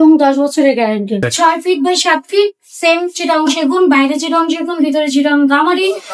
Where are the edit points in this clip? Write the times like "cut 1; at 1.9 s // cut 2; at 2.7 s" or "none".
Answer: cut 1; at 1.2 s